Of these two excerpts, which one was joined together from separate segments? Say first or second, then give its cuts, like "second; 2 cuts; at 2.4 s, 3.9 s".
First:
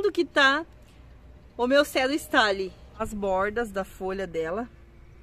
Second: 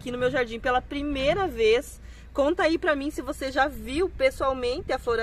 first; 1 cut; at 3.0 s